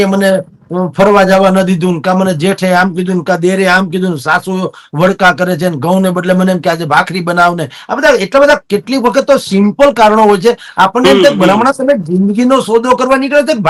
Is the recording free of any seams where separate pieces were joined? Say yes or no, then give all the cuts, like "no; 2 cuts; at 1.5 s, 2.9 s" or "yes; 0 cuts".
yes; 0 cuts